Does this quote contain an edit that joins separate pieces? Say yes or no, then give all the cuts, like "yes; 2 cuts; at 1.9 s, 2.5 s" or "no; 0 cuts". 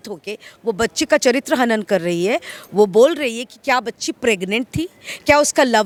no; 0 cuts